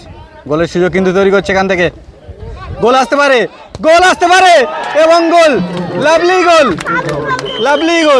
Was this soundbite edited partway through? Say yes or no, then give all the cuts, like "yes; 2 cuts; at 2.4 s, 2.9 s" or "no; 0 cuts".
no; 0 cuts